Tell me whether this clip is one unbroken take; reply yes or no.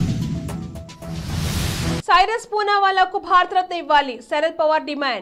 no